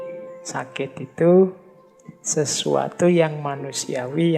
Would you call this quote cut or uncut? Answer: uncut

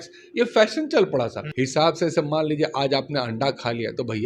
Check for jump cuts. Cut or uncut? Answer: cut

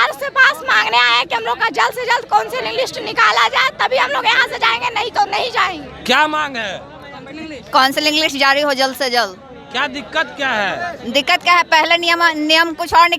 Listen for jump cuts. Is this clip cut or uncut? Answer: uncut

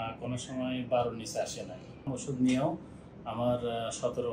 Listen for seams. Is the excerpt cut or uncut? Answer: cut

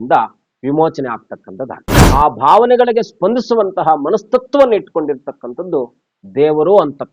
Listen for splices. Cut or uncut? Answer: cut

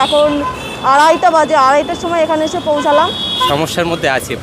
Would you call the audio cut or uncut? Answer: cut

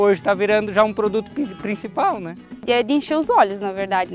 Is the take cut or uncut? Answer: cut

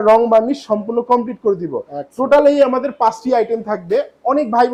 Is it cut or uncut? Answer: uncut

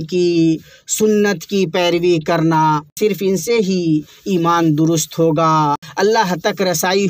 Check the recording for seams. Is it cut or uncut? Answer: cut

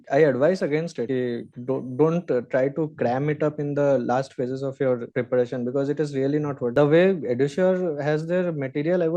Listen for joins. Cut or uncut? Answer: cut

